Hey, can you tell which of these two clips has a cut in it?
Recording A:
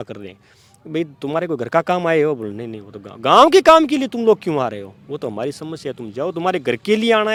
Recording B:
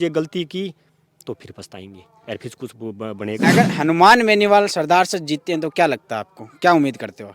B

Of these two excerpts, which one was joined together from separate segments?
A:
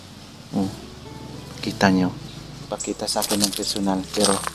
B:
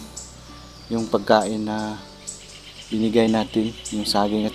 A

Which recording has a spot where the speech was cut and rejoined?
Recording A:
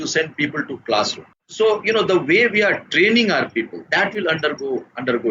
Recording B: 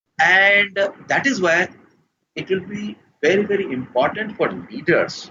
A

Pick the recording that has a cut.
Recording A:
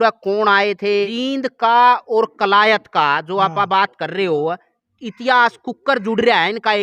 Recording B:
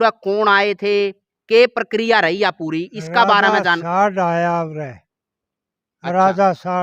A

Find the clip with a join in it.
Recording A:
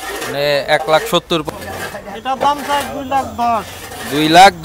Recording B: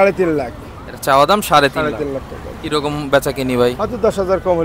A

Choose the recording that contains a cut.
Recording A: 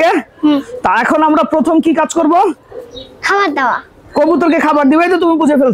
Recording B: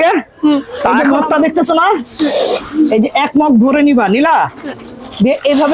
B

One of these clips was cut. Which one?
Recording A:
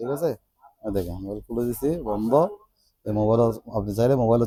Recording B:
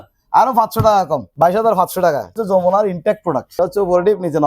B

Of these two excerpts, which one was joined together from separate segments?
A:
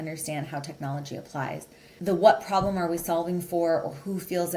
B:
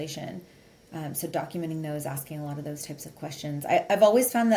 A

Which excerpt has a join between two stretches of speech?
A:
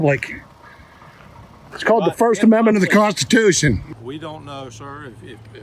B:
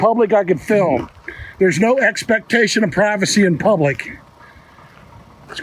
A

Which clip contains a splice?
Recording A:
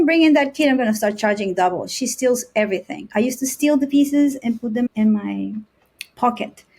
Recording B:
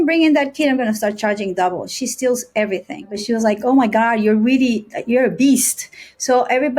B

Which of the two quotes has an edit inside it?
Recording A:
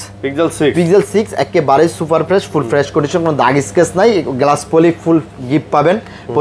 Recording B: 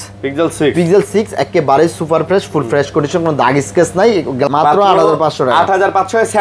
B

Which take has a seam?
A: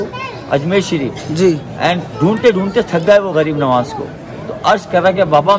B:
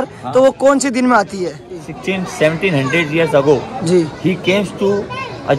B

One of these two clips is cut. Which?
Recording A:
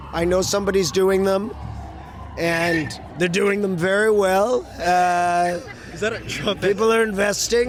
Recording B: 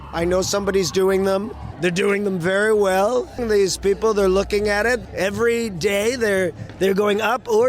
B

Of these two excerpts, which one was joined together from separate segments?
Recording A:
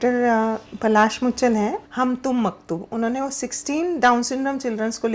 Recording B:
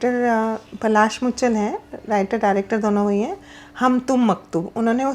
A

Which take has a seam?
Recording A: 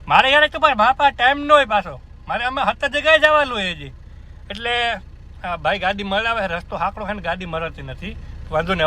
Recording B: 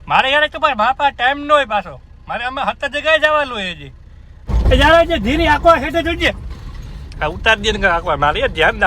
B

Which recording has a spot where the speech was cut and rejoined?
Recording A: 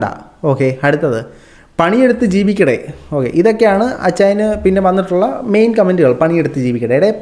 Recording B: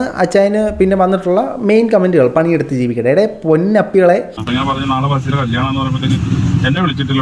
B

